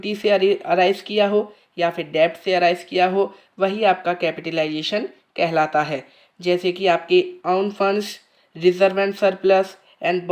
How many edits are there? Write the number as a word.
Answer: zero